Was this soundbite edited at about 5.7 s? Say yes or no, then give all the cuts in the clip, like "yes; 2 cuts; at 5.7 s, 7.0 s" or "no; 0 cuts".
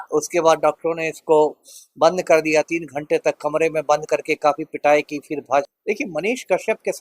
yes; 1 cut; at 5.7 s